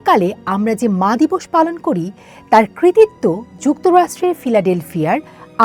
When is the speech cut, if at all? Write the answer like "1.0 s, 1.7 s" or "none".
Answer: none